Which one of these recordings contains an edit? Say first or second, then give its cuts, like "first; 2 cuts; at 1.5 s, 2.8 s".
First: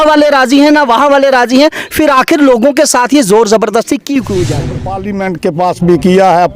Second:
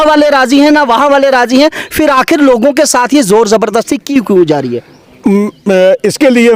first; 1 cut; at 5.1 s